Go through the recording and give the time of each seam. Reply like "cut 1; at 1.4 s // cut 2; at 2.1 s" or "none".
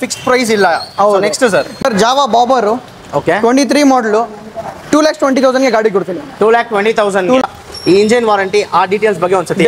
cut 1; at 1.8 s // cut 2; at 7.4 s